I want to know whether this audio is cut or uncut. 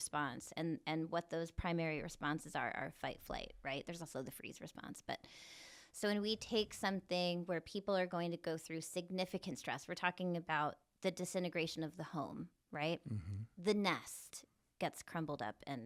uncut